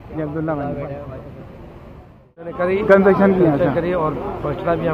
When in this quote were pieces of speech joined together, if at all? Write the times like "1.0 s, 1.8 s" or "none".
2.6 s